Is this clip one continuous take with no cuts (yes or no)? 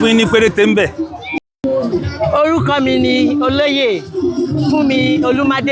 no